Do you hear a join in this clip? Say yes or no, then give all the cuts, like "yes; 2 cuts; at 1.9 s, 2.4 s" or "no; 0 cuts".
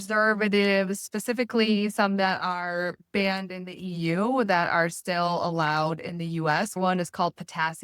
yes; 1 cut; at 6.8 s